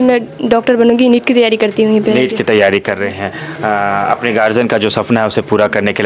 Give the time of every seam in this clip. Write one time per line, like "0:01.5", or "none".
none